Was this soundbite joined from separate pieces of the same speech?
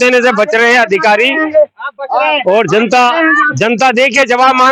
no; 0 cuts

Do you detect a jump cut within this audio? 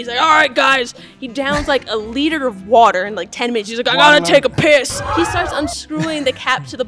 yes; 1 cut; at 5.0 s

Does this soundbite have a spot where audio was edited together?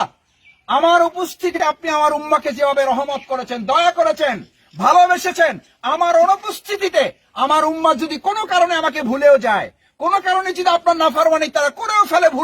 yes; 1 cut; at 1.5 s

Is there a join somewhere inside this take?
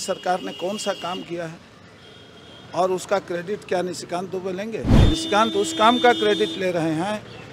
yes; 1 cut; at 4.9 s

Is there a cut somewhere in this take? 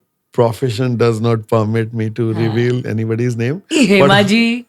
no; 0 cuts

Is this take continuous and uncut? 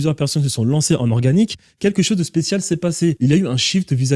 no; 1 cut; at 3.2 s

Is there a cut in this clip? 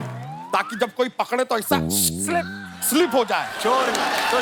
no; 0 cuts

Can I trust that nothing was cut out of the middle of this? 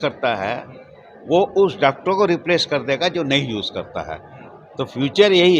yes; 0 cuts

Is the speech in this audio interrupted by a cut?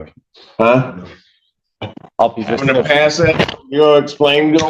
no; 0 cuts

